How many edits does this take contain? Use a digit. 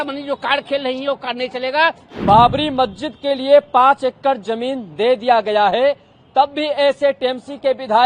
1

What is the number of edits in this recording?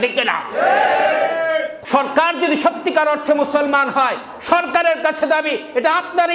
1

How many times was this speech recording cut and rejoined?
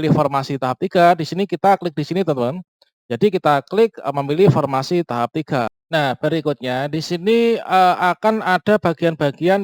1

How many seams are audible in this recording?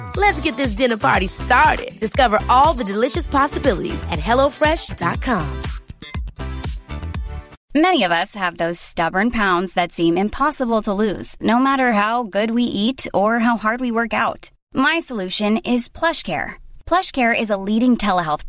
1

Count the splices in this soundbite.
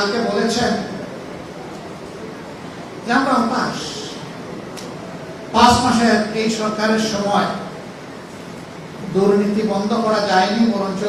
0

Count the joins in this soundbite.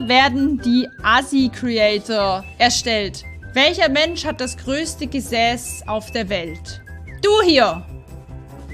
1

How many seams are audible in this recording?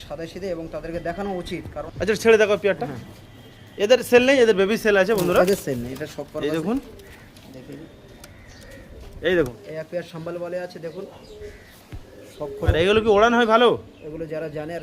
3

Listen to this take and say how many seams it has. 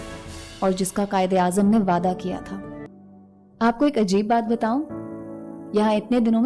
1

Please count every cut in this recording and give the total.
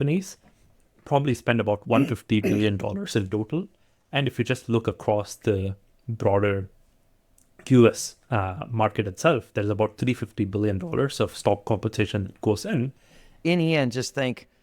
1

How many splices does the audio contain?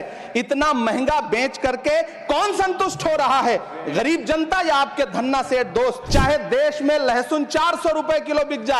1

